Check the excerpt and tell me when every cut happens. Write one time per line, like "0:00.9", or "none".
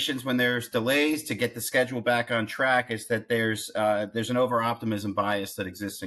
none